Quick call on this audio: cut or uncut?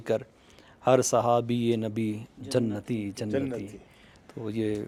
uncut